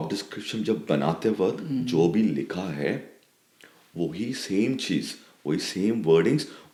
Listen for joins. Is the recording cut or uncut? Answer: uncut